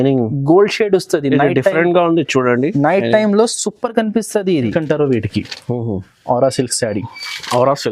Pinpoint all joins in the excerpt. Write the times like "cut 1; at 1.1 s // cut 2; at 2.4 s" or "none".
cut 1; at 4.7 s

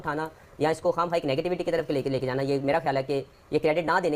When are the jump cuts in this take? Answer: none

